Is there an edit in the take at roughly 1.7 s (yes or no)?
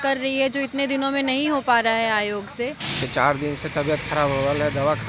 no